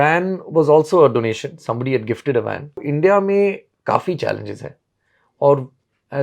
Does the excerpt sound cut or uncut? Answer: cut